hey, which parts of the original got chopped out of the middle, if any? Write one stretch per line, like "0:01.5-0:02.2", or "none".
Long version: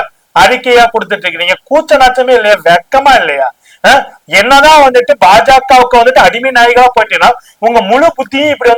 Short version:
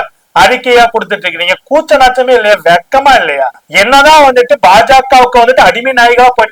0:03.6-0:04.2